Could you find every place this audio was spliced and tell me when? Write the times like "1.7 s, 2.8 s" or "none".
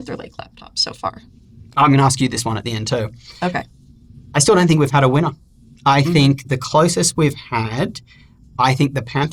none